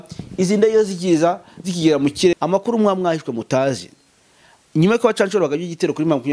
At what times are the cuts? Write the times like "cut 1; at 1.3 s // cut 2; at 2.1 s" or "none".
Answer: cut 1; at 2.3 s